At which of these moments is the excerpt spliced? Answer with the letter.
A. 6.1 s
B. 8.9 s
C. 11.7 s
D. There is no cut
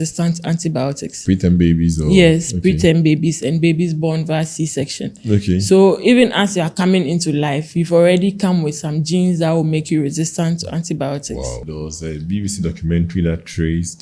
C